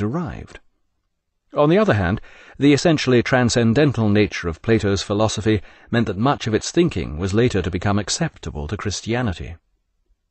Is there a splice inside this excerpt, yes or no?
yes